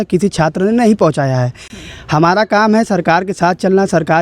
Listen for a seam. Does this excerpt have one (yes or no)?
no